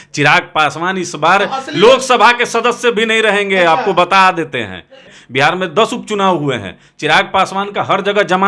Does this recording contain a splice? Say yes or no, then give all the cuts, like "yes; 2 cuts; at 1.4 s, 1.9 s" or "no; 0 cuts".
yes; 1 cut; at 5.2 s